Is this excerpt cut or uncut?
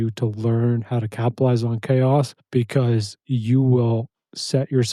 cut